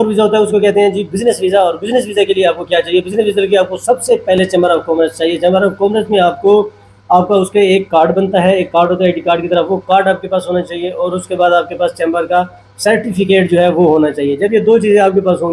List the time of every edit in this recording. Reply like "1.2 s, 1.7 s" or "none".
none